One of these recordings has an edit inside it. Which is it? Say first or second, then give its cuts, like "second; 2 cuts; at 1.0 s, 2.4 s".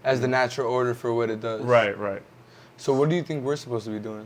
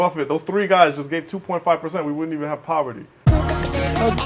second; 1 cut; at 3.1 s